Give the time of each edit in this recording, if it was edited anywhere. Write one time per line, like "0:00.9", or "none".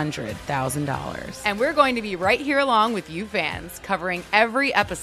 none